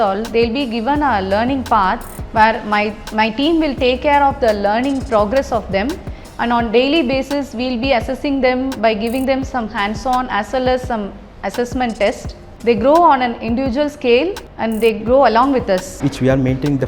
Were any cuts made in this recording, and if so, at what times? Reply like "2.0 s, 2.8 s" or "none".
14.5 s, 16.0 s